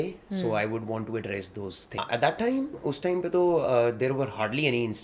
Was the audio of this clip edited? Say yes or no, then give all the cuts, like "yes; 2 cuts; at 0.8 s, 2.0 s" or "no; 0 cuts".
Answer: yes; 1 cut; at 1.9 s